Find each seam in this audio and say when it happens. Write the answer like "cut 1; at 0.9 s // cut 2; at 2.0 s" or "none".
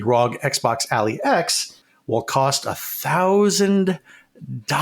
cut 1; at 1.8 s